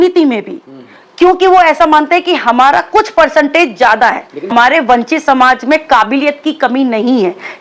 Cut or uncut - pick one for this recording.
cut